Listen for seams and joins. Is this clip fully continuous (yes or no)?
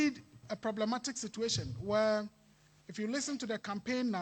yes